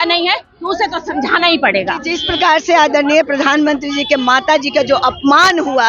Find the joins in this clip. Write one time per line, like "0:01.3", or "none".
0:02.2